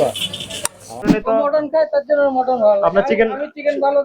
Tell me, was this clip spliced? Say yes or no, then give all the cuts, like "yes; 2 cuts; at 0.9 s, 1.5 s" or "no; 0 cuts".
yes; 1 cut; at 1.1 s